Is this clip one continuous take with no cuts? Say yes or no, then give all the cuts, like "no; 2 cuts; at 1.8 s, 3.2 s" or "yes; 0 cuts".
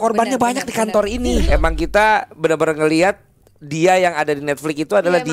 no; 1 cut; at 1.5 s